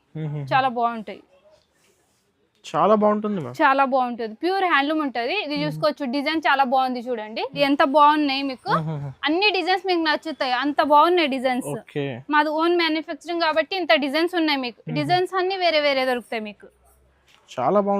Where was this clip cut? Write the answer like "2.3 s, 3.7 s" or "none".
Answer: 7.6 s